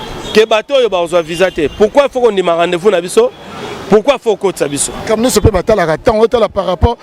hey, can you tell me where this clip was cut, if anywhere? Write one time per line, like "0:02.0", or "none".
0:05.1

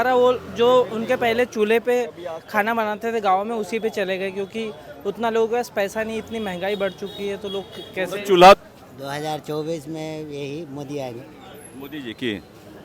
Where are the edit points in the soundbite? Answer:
0:08.6

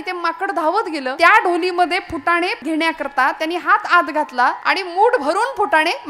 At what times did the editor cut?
0:01.1
0:02.6
0:04.6

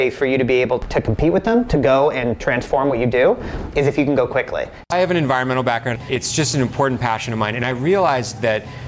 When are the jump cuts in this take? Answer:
0:04.9
0:06.0

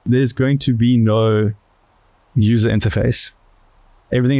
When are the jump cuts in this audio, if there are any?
none

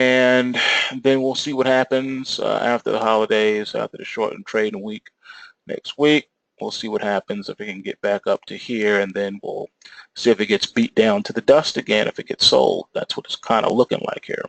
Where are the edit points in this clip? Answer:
0:03.7

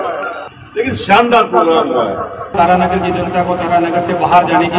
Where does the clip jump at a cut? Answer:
0:02.5

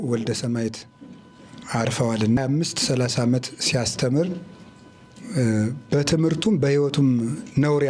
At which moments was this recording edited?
0:02.4

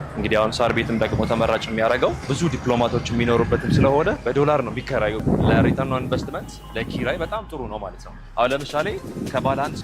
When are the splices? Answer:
0:02.3
0:04.2
0:05.2

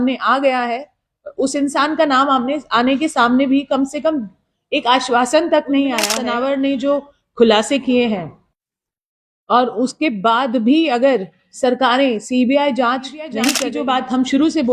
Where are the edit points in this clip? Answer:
0:06.2
0:13.6

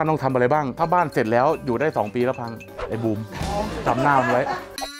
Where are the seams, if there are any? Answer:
none

